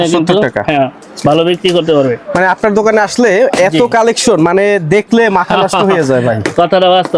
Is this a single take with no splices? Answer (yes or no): yes